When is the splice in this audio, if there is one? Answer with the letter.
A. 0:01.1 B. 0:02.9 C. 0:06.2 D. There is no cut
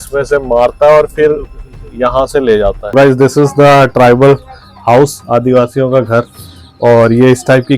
B